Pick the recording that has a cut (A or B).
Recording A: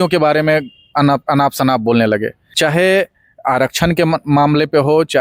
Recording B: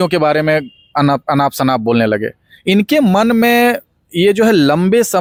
A